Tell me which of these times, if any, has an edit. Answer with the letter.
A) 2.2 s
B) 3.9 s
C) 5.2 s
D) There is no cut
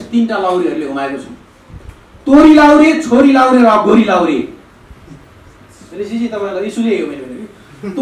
D